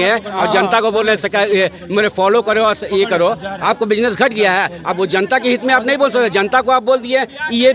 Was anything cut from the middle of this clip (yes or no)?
no